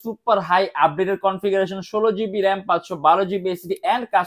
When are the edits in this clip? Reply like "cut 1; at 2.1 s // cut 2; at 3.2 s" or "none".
none